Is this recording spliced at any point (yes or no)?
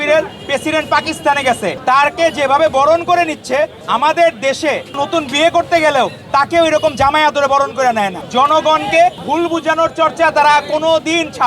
yes